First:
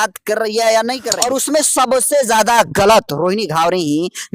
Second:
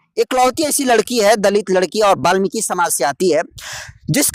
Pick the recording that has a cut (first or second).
first